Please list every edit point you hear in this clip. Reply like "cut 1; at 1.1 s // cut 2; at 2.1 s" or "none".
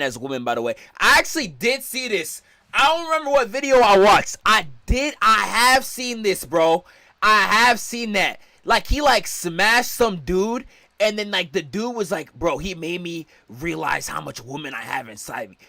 none